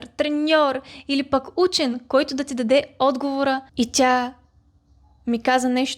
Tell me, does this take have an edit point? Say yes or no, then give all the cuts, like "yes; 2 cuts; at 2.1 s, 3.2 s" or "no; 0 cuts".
yes; 1 cut; at 3.7 s